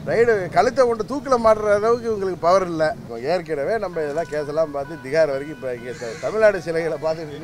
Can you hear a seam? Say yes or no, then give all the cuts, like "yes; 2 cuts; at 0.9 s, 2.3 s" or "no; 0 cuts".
yes; 1 cut; at 3.1 s